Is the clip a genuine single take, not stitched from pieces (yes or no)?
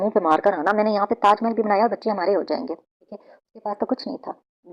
yes